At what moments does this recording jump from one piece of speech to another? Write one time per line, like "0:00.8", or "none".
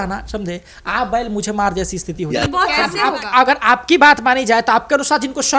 0:02.9